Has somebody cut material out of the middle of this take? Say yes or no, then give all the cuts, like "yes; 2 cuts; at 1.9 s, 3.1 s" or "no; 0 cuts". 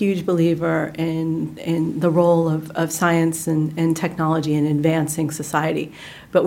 no; 0 cuts